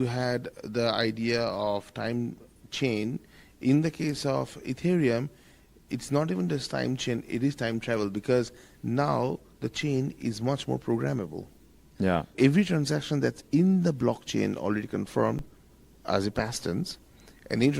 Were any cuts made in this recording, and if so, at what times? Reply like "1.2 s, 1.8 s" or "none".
12.3 s